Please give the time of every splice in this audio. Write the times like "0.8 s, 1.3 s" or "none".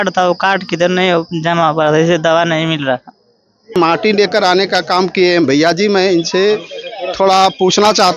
3.7 s